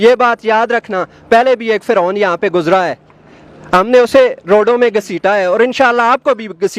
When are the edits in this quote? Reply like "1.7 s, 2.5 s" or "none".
none